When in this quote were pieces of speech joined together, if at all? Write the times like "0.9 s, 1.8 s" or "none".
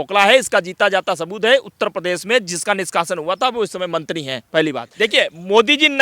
4.9 s